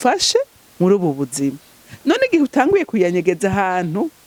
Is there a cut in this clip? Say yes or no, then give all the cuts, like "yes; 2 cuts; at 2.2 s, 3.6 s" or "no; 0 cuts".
no; 0 cuts